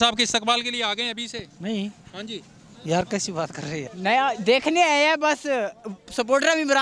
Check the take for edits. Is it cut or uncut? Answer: cut